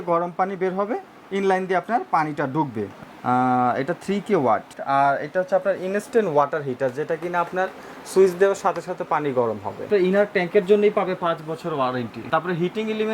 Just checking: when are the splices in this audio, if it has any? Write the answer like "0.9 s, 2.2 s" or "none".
2.9 s, 4.7 s, 9.9 s, 12.2 s